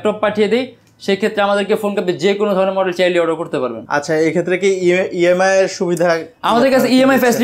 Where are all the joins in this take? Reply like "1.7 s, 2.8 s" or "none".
none